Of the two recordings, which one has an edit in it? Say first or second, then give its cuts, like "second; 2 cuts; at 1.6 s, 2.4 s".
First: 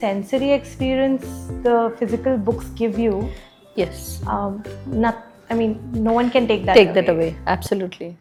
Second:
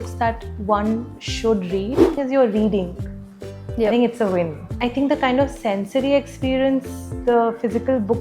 second; 2 cuts; at 2.1 s, 4.7 s